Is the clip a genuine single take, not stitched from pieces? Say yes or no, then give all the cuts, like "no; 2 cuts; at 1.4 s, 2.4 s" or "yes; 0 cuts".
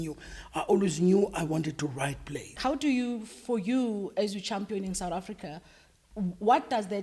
no; 1 cut; at 2.6 s